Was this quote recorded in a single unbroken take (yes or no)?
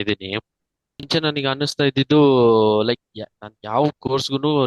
no